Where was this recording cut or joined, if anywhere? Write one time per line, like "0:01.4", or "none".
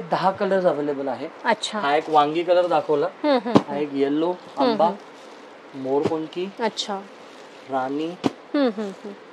none

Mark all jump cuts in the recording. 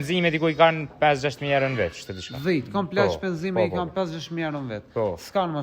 none

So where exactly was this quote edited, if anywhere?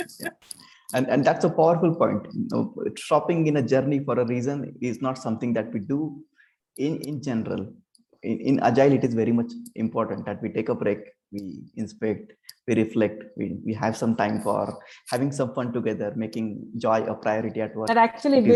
none

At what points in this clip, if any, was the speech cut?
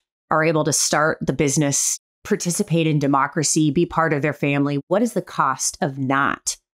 0:01.9
0:04.8

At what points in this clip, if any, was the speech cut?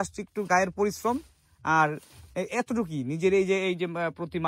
none

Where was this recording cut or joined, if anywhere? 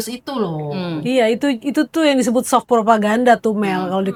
none

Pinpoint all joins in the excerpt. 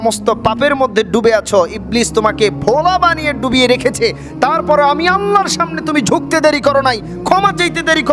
none

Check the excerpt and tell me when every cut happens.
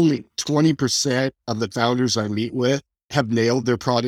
0:03.0

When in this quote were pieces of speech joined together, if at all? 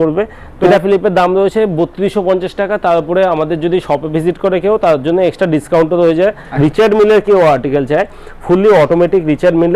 0:00.7
0:06.4

